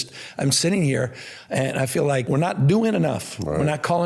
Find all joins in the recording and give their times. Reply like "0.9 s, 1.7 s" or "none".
2.2 s